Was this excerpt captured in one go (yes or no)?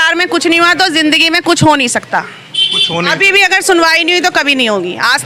yes